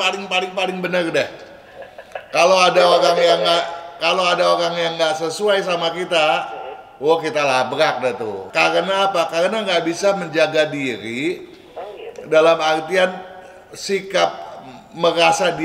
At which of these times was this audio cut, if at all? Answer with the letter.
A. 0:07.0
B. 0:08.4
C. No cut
B